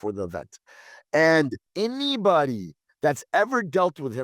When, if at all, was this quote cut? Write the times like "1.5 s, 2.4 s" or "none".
1.6 s

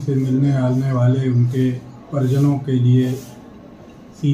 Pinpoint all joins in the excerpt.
2.4 s

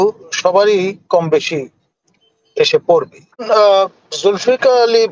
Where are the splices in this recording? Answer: 3.4 s

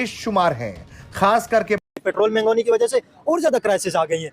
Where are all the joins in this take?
1.8 s

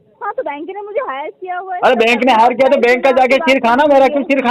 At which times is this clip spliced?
none

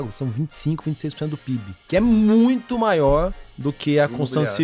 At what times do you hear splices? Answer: 1.8 s

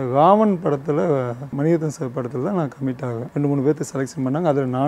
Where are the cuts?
1.5 s, 3.3 s

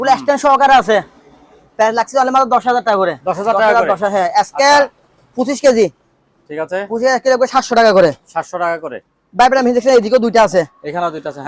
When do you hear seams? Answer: none

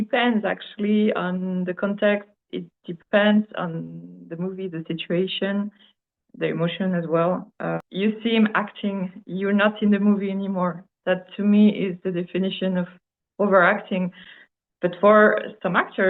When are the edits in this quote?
7.8 s

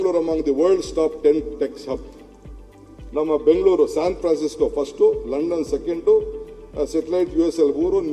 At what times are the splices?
none

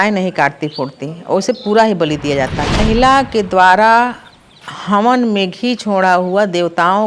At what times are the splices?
2.8 s

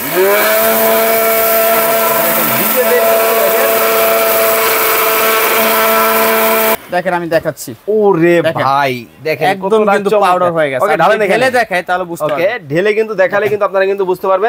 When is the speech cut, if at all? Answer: 6.8 s

